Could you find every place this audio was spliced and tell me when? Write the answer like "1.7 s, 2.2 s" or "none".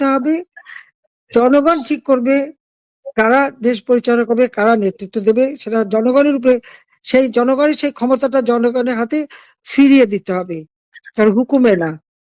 none

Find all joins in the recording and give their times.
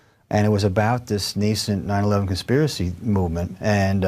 2.2 s

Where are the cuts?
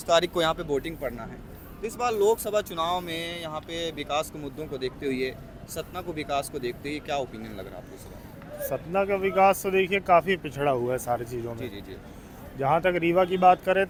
none

